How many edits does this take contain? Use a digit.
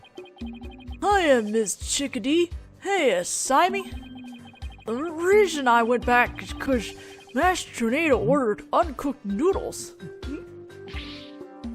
0